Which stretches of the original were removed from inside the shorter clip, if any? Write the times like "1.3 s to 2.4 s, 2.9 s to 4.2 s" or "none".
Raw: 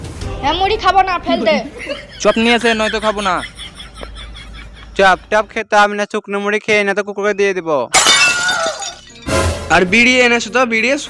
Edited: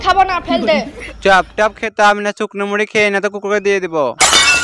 1.8 s to 4.8 s